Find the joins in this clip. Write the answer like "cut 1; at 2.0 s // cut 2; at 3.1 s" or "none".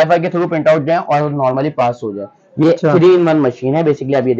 cut 1; at 2.6 s